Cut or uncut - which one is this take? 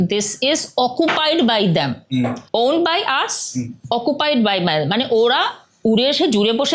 uncut